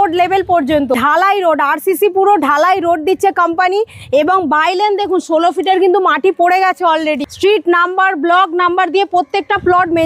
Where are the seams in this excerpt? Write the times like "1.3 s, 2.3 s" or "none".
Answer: 1.0 s, 7.3 s